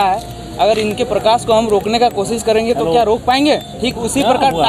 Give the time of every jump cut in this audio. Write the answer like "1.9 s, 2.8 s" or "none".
3.8 s